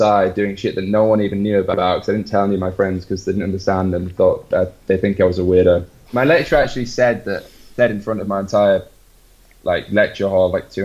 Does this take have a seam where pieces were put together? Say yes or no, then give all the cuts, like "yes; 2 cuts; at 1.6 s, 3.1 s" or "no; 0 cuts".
yes; 1 cut; at 6.1 s